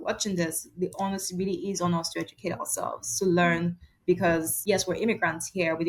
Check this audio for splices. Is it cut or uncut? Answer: cut